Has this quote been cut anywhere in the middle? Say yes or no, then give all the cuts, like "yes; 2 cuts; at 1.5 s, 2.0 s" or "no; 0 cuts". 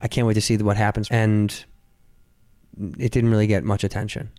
yes; 1 cut; at 1.0 s